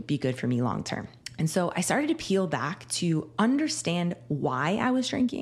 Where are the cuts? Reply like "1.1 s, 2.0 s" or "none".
1.2 s